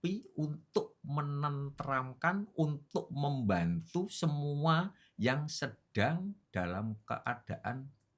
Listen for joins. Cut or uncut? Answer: uncut